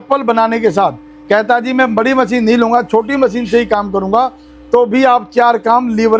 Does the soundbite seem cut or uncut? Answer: uncut